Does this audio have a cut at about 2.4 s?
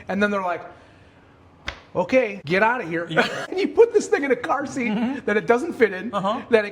yes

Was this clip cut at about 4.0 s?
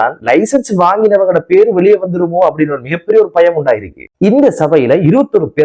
yes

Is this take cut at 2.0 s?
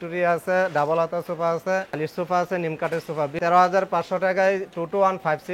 yes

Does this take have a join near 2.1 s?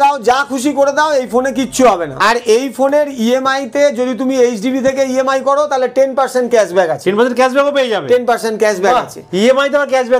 no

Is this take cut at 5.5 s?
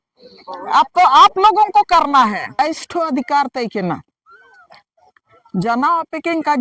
no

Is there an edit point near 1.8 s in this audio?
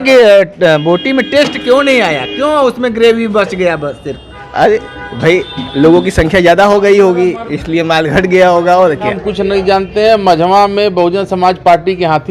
no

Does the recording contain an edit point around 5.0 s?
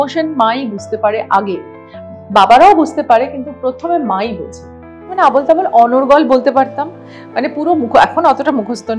yes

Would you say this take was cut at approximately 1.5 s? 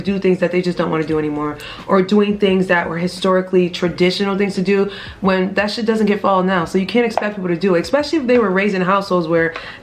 no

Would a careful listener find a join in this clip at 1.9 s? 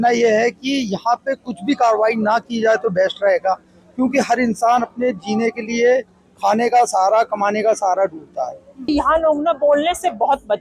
no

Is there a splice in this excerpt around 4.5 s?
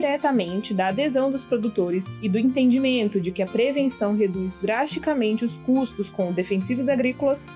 no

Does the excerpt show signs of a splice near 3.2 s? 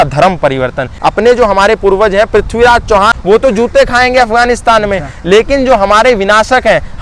yes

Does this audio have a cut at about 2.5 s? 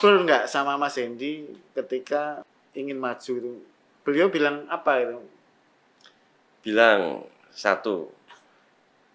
yes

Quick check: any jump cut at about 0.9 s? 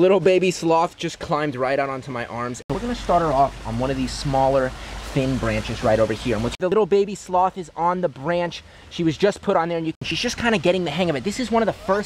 no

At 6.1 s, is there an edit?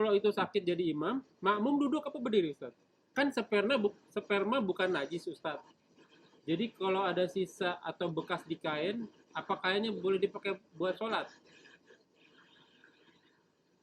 no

